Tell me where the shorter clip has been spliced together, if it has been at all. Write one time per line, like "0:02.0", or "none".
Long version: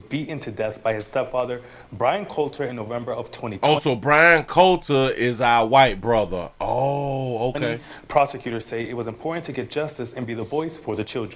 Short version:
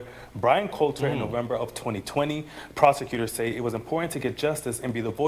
0:02.0

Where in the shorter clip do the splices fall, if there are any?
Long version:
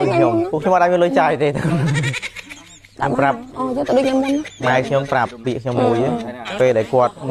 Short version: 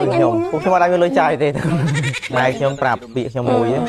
0:02.2

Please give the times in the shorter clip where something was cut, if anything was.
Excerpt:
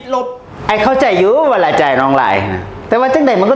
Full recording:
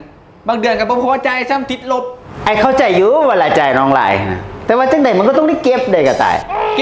none

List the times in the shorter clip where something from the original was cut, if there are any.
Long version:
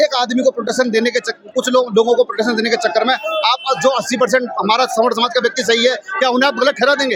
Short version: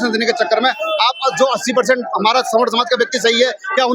none

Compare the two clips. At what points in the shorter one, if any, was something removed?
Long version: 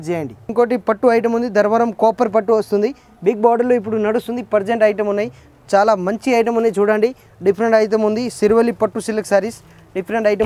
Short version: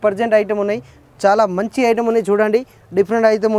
none

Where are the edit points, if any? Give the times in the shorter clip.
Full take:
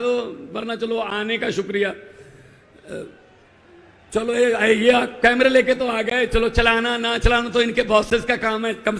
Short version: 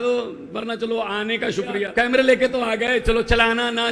0:01.9

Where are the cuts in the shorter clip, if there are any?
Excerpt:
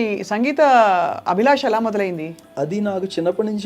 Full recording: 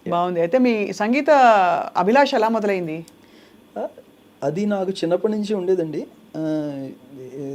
0:02.4

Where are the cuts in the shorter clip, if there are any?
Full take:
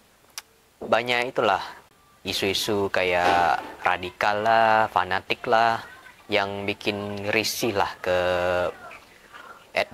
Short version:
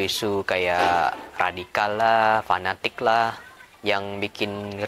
none

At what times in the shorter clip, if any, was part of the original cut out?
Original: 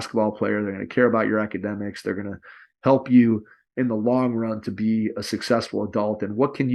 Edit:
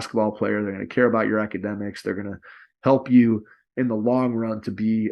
none

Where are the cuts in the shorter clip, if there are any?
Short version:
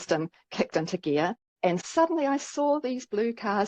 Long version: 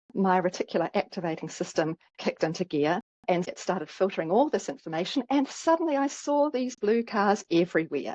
0:01.6

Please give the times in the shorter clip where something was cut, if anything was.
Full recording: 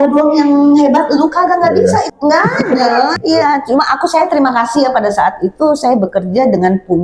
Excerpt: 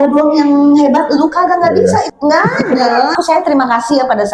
0:03.2

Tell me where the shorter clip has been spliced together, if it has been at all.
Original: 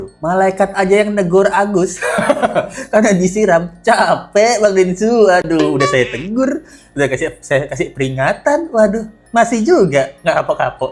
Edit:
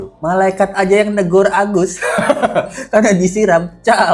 none

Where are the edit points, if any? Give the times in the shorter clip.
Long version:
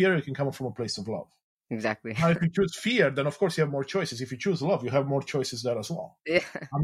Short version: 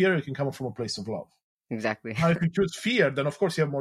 none

